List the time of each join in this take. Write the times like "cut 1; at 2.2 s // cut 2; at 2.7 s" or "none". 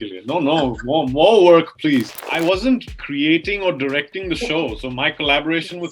cut 1; at 2.2 s // cut 2; at 3.0 s